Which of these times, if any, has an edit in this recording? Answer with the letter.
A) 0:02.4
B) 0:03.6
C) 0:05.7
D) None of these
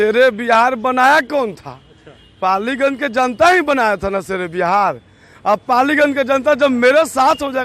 D